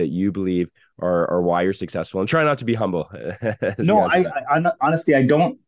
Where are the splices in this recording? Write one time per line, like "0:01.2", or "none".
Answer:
none